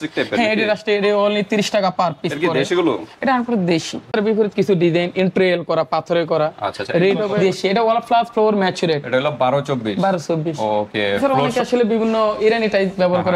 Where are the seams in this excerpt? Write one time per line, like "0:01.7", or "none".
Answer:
0:04.1
0:07.3
0:11.2